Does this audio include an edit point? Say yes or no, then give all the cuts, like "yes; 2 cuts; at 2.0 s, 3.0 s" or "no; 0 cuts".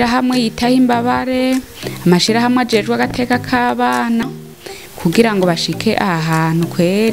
yes; 1 cut; at 4.3 s